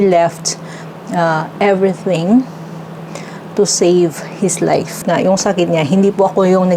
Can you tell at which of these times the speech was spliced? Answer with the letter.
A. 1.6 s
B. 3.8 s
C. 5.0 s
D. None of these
C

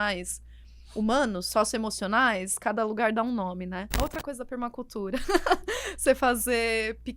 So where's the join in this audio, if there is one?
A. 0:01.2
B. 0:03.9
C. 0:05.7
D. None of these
B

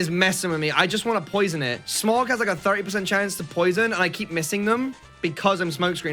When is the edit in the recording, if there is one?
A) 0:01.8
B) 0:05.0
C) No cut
A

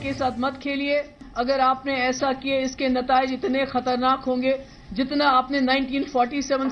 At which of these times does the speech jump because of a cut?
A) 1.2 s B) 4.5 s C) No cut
A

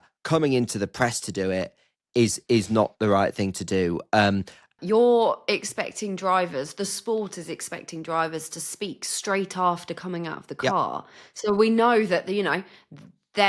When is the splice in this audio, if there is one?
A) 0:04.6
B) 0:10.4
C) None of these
A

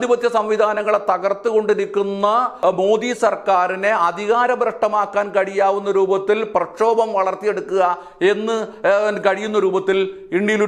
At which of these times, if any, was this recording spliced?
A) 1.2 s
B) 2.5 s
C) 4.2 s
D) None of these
B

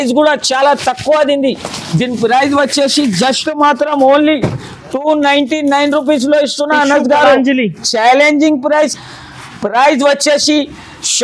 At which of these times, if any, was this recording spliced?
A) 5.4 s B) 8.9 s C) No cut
B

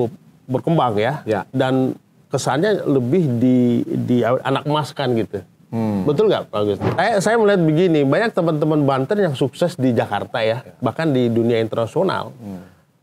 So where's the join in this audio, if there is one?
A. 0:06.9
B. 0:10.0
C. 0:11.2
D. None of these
A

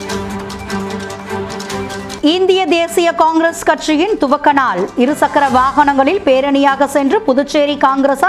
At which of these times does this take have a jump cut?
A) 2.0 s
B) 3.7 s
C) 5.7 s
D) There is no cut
A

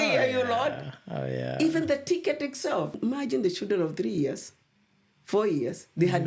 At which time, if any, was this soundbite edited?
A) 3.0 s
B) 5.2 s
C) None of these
A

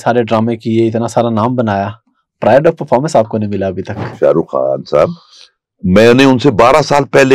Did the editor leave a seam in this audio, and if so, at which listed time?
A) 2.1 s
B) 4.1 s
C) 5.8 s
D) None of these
B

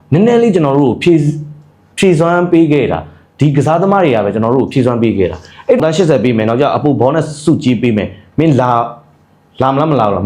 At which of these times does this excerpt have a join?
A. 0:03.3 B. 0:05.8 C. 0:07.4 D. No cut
B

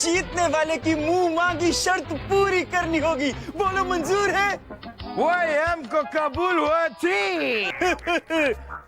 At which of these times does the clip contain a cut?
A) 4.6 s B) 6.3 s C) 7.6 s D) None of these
C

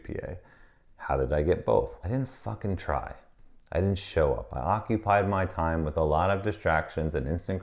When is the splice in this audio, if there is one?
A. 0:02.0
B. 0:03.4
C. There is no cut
A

